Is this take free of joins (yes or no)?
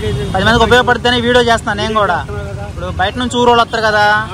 yes